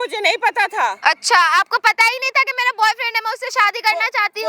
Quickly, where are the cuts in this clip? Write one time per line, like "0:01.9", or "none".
none